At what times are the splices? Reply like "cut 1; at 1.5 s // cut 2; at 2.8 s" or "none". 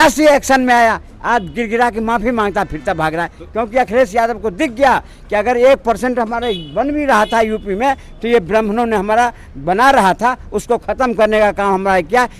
none